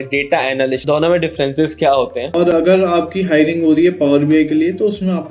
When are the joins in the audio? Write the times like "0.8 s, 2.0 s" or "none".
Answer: 0.8 s, 2.4 s